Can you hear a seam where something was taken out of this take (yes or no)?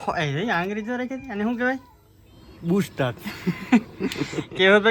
yes